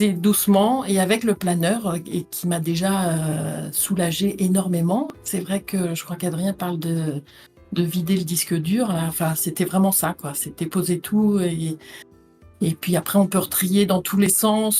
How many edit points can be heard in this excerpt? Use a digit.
0